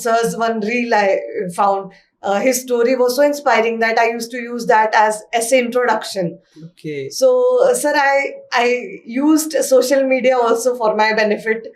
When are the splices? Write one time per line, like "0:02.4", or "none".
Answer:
none